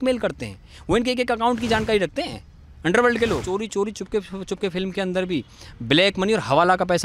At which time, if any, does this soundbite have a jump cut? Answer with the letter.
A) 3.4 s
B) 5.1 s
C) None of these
A